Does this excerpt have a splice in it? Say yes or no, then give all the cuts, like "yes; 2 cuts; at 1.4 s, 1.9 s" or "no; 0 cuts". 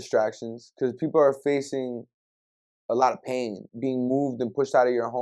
yes; 1 cut; at 3.6 s